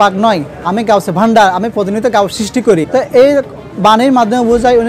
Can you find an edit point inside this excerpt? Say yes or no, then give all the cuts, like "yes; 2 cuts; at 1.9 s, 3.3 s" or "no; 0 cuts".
yes; 1 cut; at 2.9 s